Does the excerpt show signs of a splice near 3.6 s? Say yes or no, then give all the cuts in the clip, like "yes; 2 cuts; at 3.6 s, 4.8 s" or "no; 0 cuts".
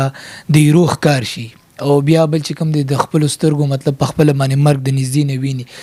no; 0 cuts